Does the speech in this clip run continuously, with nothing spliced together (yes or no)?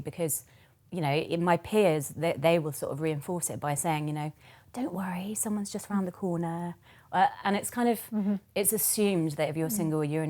yes